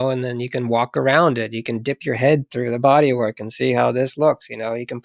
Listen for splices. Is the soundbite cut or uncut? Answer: uncut